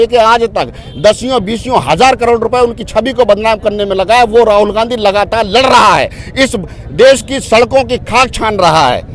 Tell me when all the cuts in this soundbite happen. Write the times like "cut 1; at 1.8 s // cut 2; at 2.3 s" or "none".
none